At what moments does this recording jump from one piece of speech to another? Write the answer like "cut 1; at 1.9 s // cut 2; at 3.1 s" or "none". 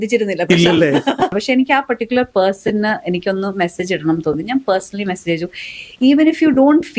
cut 1; at 1.3 s